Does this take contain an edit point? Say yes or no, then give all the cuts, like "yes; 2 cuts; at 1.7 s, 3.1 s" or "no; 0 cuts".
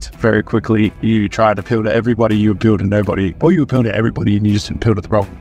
yes; 2 cuts; at 1.0 s, 3.3 s